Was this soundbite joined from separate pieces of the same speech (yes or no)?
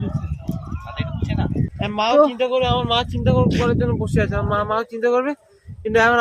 yes